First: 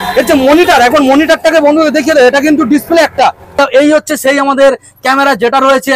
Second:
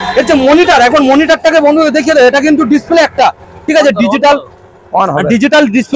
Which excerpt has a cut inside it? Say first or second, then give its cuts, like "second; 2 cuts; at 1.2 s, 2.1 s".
first; 1 cut; at 3.6 s